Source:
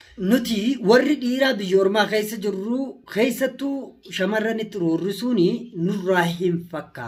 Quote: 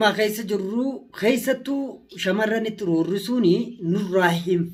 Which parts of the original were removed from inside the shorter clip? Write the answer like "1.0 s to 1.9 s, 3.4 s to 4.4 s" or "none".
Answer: none